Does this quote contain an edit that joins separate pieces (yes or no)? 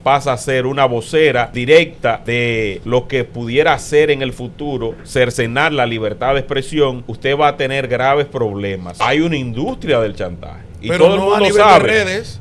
yes